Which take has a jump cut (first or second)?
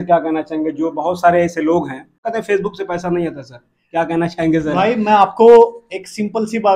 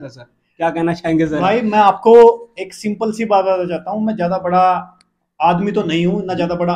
first